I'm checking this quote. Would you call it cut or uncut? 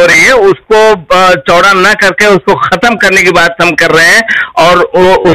uncut